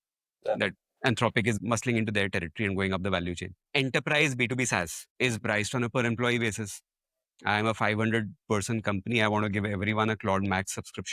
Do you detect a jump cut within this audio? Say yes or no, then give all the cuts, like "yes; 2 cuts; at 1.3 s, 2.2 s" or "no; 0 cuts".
yes; 3 cuts; at 1.6 s, 3.5 s, 5.0 s